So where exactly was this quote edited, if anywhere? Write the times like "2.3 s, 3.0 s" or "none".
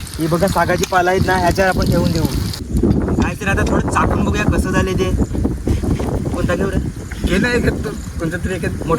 2.5 s